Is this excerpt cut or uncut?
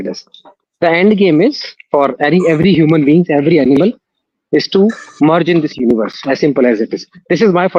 uncut